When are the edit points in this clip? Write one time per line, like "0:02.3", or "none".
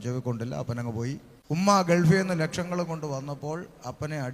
0:01.3